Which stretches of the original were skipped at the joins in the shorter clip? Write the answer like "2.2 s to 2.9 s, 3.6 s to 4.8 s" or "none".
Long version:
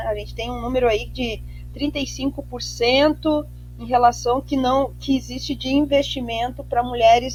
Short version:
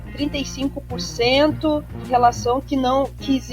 3.6 s to 3.7 s